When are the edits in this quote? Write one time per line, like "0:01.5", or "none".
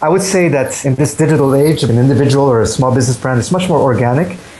0:00.8
0:01.8